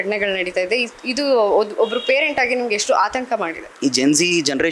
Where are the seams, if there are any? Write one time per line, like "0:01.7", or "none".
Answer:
0:03.7